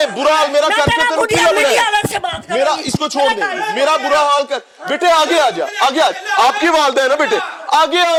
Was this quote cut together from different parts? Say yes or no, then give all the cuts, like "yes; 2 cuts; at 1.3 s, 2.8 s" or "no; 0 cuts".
no; 0 cuts